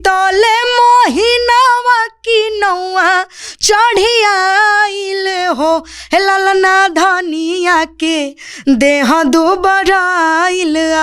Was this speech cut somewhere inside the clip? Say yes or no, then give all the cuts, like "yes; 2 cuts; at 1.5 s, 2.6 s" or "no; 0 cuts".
no; 0 cuts